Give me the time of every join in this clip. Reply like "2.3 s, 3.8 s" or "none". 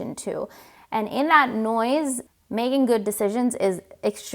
2.2 s